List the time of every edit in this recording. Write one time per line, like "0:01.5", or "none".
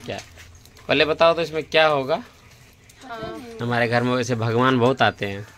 0:03.6